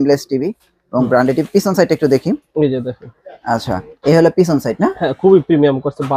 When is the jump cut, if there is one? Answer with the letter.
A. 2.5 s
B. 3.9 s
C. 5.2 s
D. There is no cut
D